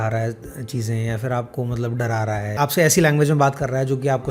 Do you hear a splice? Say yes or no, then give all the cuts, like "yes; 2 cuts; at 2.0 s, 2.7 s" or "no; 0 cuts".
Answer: yes; 1 cut; at 2.5 s